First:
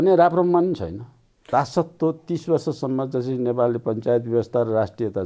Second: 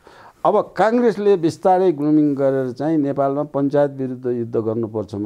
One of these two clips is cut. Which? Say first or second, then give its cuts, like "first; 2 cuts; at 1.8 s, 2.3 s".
first; 1 cut; at 1.5 s